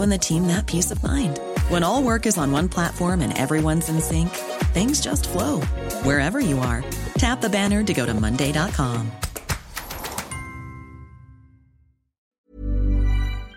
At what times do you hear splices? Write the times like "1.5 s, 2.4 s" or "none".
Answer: 12.3 s